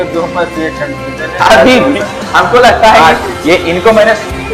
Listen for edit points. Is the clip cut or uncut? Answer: uncut